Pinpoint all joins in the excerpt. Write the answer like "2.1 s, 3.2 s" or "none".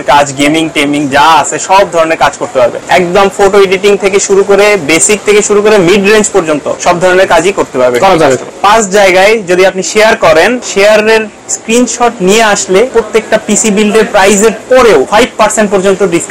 2.8 s, 6.7 s, 8.5 s, 10.6 s, 12.9 s, 15.1 s